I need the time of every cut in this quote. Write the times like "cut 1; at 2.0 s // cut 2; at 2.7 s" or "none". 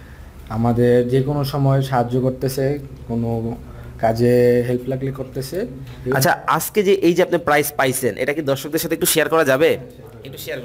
none

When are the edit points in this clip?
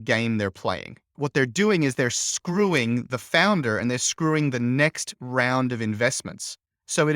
cut 1; at 1.1 s

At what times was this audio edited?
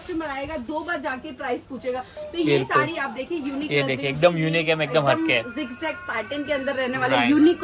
cut 1; at 2.2 s

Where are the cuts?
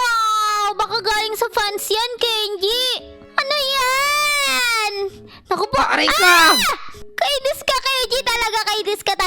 cut 1; at 3.1 s

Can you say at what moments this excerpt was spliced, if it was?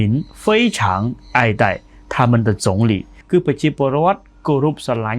cut 1; at 3.1 s

